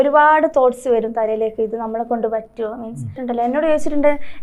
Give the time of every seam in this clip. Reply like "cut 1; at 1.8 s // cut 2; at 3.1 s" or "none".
cut 1; at 3.2 s